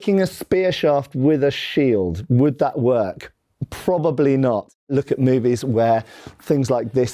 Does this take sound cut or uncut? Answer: uncut